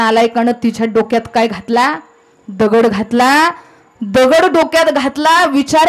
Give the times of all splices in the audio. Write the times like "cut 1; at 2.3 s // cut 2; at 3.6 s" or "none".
none